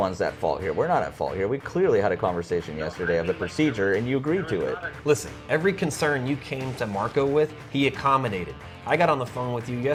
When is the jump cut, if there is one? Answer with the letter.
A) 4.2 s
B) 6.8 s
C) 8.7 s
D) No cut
D